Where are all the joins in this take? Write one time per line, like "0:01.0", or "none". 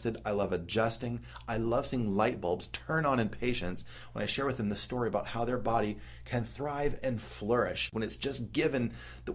0:07.9